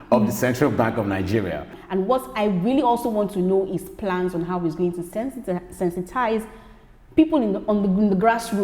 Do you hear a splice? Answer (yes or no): yes